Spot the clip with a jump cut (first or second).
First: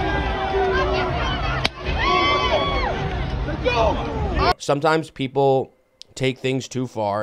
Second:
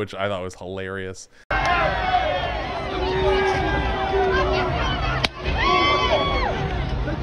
first